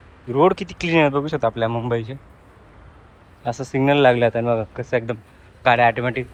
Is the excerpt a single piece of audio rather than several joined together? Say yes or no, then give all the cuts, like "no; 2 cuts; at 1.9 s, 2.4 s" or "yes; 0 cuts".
yes; 0 cuts